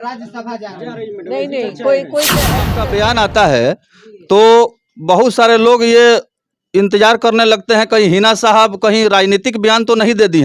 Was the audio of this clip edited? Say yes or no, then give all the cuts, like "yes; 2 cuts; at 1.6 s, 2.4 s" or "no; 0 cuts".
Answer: yes; 1 cut; at 2.8 s